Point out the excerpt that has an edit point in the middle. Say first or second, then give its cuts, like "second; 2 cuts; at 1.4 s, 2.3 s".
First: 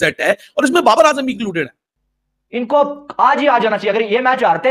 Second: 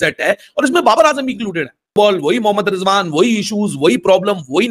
first; 1 cut; at 1.8 s